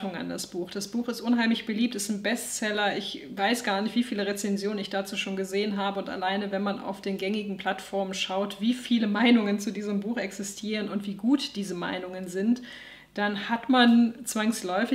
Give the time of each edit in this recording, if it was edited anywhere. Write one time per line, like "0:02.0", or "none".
none